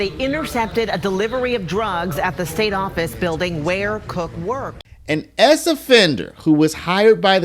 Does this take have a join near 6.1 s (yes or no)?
no